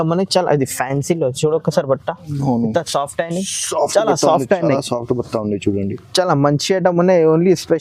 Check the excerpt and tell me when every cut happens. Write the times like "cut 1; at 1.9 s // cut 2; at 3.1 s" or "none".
none